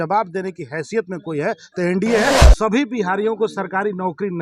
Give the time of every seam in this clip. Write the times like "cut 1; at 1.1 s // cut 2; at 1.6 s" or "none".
cut 1; at 2.4 s